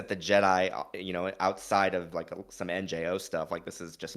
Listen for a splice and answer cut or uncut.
cut